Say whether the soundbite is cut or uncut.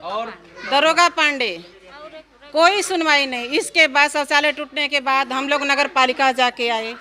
uncut